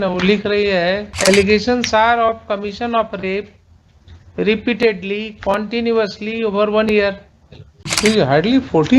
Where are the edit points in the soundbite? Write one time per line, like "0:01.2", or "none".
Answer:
0:01.1
0:07.1